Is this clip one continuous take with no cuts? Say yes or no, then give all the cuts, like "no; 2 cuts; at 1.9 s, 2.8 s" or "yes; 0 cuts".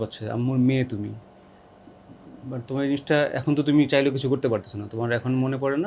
yes; 0 cuts